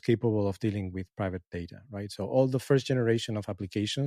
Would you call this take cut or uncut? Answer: uncut